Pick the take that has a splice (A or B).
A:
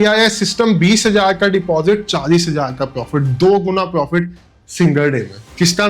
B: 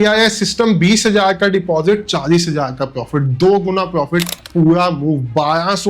B